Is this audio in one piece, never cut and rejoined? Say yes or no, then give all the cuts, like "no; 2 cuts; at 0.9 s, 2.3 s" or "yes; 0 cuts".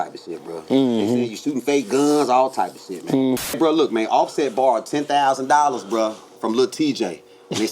no; 1 cut; at 3.4 s